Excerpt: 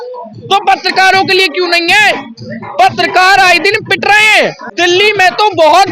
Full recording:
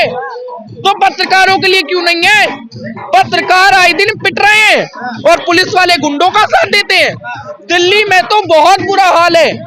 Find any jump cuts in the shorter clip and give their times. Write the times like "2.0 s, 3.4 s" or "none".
4.6 s